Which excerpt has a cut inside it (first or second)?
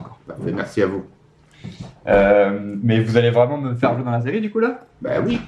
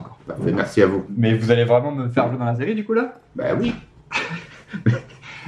second